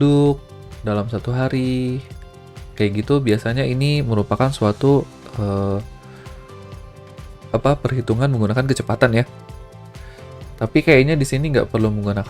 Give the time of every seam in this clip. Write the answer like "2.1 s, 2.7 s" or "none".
5.9 s, 7.5 s